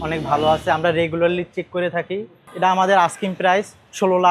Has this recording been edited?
yes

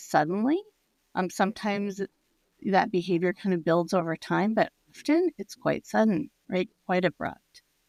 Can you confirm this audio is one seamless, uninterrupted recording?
yes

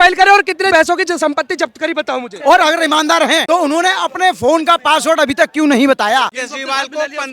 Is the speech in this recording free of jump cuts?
no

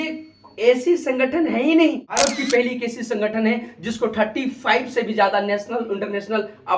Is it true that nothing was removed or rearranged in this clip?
no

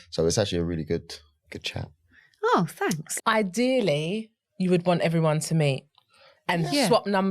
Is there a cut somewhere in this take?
yes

